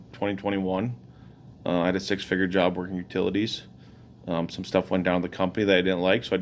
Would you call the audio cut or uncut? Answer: uncut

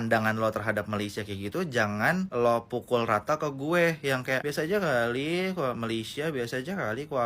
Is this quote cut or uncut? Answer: uncut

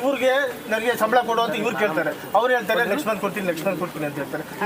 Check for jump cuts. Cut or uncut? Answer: uncut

